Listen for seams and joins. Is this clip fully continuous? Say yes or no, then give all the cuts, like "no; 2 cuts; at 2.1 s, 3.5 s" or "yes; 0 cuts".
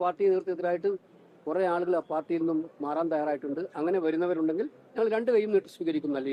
yes; 0 cuts